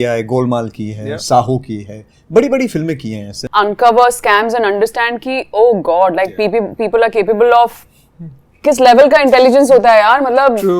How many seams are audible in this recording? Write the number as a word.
one